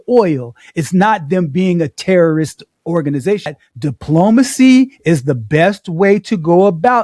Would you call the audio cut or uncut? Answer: cut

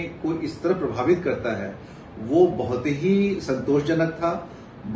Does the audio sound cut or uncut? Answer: uncut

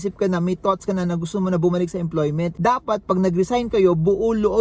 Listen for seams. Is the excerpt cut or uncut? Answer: cut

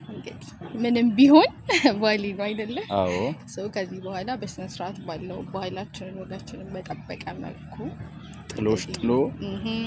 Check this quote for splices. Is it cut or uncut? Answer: uncut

